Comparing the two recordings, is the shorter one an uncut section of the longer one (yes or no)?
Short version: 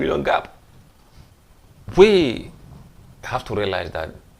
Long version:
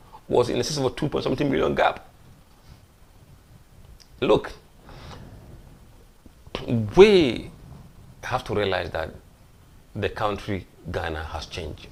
no